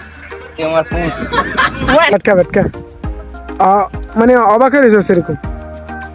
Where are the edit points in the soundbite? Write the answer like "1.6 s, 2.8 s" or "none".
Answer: 2.1 s